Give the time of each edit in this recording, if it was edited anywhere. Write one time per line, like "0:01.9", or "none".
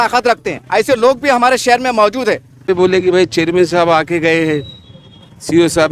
0:02.7